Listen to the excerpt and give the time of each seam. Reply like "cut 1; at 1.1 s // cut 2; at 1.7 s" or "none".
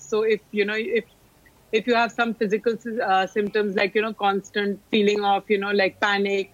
cut 1; at 4.8 s